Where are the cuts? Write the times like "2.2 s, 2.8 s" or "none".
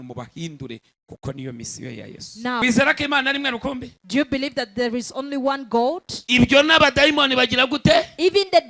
2.6 s